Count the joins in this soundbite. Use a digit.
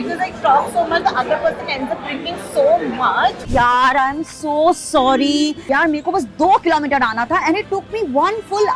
2